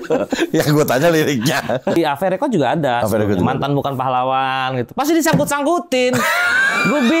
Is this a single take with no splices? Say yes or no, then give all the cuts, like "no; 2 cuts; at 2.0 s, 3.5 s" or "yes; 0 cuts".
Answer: no; 1 cut; at 2.0 s